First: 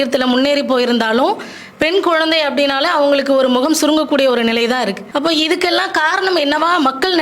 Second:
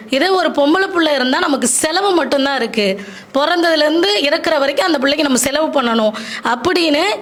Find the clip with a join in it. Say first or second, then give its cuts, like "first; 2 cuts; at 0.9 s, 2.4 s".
first; 1 cut; at 5.0 s